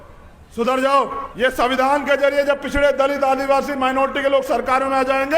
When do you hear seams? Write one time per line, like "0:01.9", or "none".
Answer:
0:01.2